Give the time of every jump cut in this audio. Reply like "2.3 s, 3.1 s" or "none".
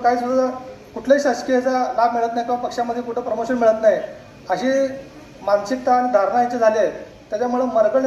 none